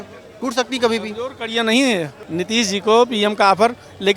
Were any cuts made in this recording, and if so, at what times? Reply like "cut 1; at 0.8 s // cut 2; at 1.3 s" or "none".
cut 1; at 2.2 s